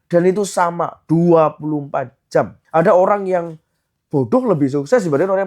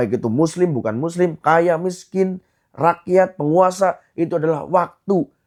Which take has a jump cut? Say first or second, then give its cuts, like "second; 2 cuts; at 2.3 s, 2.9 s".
first; 1 cut; at 2.6 s